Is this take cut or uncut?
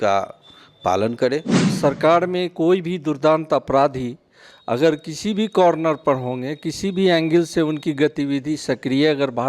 cut